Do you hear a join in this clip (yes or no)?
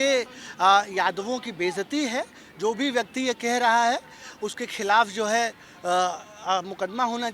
no